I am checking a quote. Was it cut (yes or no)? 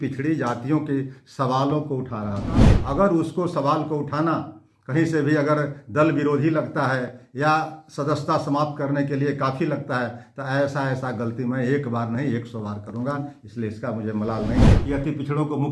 yes